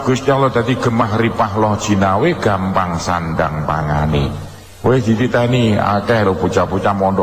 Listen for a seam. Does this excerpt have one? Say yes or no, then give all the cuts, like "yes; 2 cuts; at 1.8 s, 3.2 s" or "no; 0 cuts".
no; 0 cuts